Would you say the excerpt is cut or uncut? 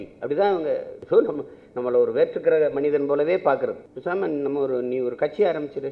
cut